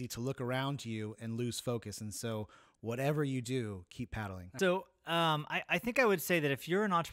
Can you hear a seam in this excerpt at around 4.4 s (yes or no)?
yes